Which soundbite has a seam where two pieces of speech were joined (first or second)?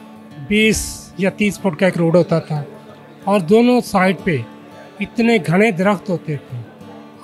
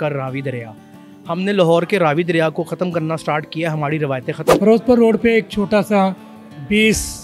second